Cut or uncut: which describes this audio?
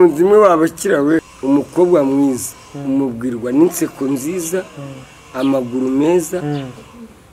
cut